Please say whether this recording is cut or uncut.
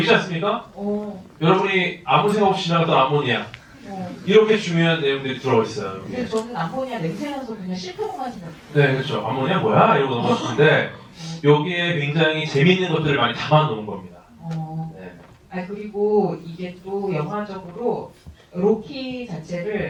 uncut